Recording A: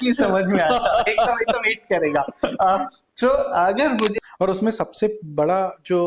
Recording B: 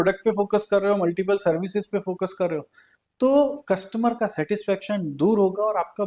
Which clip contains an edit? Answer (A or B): A